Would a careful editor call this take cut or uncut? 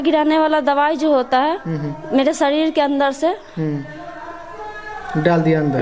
uncut